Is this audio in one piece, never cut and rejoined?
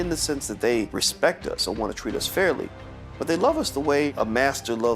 no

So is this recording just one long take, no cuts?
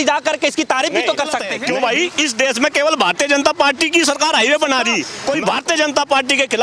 no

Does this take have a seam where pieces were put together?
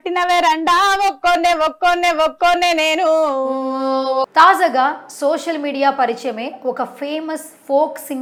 no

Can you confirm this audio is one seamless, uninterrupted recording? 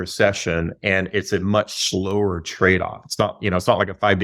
yes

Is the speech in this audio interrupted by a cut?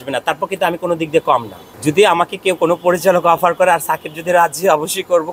no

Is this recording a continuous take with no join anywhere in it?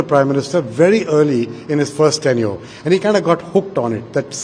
yes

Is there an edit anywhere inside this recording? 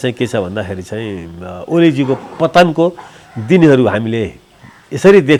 no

